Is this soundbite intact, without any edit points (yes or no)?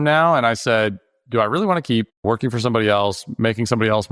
no